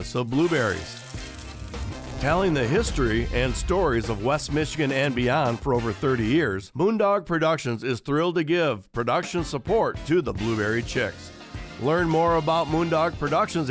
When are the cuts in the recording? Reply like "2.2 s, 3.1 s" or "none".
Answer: 6.6 s